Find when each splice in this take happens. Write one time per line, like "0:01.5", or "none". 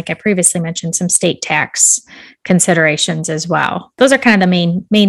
0:03.9